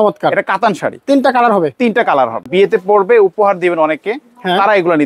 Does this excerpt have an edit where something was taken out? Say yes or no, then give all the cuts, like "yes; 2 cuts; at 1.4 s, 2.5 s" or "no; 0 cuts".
yes; 1 cut; at 2.4 s